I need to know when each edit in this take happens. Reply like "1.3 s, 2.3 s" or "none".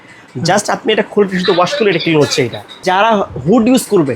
2.8 s